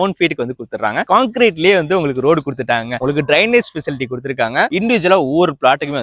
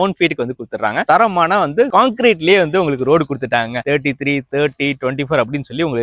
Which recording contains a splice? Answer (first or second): first